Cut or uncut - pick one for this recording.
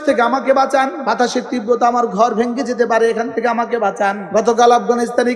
cut